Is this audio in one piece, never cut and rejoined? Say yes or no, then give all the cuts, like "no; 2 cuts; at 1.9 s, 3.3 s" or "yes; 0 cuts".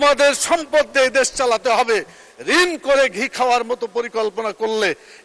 yes; 0 cuts